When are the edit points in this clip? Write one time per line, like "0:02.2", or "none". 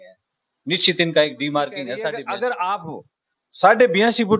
0:02.0